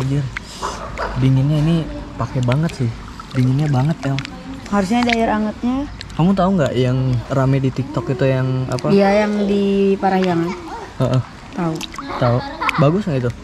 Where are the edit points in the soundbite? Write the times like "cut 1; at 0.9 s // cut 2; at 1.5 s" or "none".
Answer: none